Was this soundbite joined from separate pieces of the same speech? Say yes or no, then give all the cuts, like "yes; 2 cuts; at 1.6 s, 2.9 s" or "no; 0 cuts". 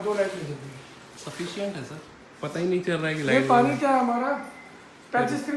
no; 0 cuts